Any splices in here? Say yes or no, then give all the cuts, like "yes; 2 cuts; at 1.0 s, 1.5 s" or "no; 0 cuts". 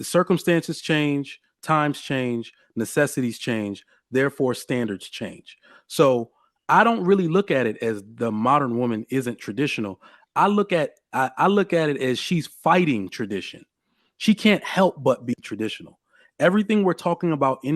no; 0 cuts